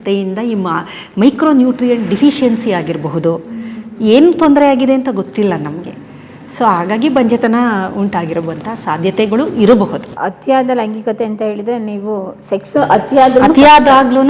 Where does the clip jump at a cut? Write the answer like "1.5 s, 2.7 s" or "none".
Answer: none